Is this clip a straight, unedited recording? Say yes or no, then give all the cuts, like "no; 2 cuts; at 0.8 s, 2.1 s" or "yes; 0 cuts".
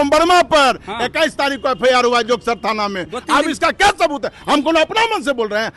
yes; 0 cuts